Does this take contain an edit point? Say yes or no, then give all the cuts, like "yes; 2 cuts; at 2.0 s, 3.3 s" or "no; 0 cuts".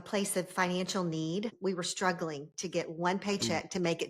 yes; 1 cut; at 1.5 s